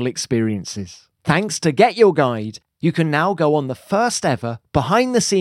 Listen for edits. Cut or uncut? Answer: cut